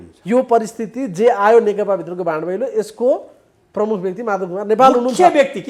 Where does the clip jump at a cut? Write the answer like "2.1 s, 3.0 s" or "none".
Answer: none